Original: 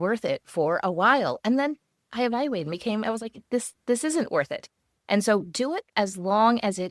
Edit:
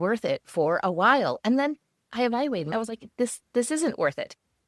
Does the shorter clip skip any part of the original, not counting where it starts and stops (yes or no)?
yes